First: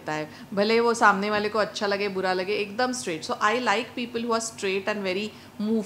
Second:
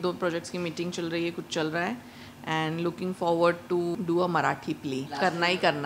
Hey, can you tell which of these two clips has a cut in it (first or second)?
second